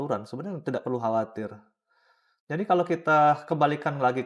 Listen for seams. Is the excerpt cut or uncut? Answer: uncut